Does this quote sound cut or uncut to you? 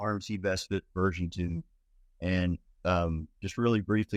uncut